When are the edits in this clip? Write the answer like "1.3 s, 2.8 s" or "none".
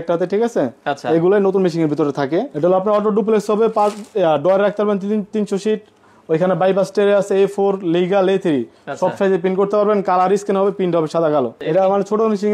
2.5 s, 11.6 s